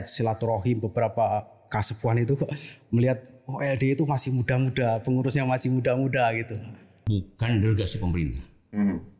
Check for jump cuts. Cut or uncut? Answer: cut